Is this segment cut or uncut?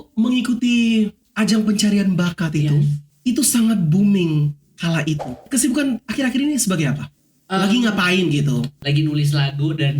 cut